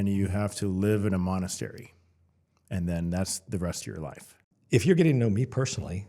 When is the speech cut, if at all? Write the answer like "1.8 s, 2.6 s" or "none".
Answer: 4.3 s